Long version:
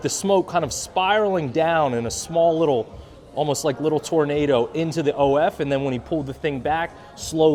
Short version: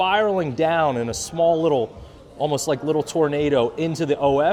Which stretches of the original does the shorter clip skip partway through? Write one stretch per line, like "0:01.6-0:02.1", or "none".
none